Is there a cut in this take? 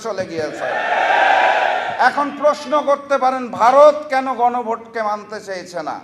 no; 0 cuts

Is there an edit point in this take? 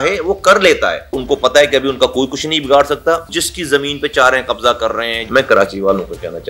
yes; 3 cuts; at 1.2 s, 3.4 s, 5.2 s

